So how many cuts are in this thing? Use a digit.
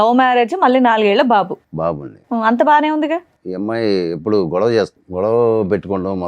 2